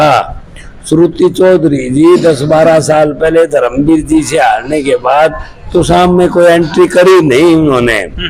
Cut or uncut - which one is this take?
uncut